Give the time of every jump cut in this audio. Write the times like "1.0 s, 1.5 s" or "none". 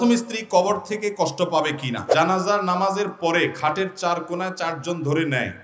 2.0 s